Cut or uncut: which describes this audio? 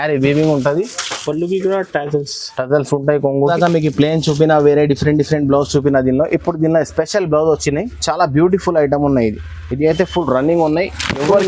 cut